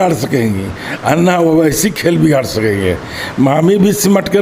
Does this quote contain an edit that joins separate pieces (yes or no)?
no